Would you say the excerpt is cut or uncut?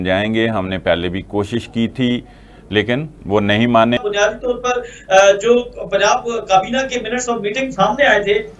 cut